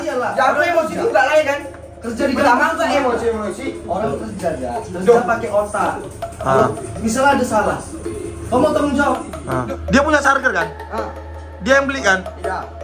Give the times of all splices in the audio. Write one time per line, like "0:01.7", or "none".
0:09.6